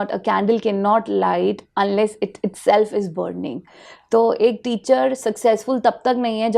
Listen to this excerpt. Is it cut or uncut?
uncut